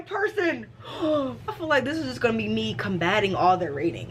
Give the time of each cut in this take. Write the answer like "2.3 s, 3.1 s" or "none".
1.6 s